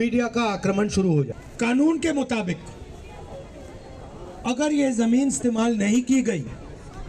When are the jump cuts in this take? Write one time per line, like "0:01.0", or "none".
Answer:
0:01.4